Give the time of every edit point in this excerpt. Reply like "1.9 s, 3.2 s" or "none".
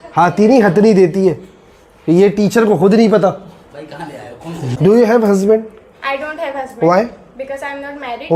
4.6 s